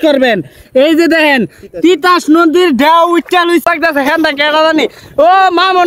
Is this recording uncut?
no; 1 cut; at 3.6 s

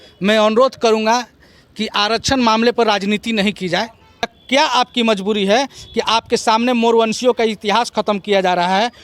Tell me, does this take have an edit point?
yes; 1 cut; at 4.4 s

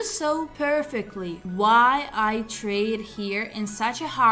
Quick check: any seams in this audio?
no; 0 cuts

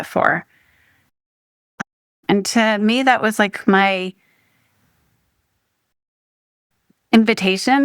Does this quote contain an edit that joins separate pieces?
yes; 1 cut; at 2.2 s

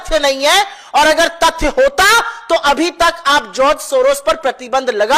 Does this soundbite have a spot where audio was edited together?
no; 0 cuts

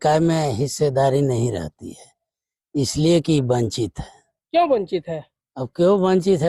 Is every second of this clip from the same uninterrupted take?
yes; 0 cuts

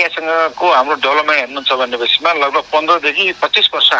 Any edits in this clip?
no; 0 cuts

